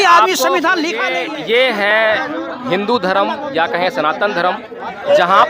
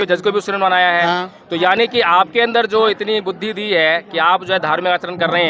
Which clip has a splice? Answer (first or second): first